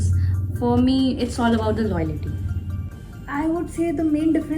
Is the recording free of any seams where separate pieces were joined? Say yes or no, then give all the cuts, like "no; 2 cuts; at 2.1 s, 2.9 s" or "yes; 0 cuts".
no; 1 cut; at 2.7 s